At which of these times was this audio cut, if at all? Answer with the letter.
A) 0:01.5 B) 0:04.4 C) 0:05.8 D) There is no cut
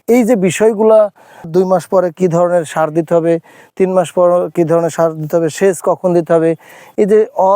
A